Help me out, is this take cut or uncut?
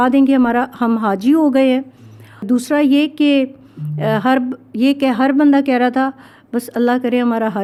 uncut